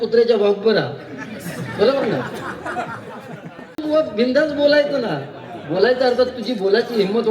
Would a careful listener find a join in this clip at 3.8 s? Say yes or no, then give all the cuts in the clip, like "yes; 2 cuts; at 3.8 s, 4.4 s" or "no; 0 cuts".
yes; 1 cut; at 3.8 s